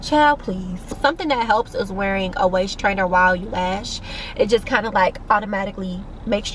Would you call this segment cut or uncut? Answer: uncut